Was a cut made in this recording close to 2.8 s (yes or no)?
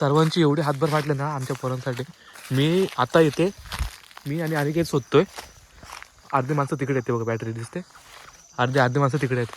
no